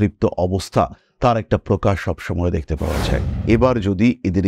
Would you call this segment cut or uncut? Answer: cut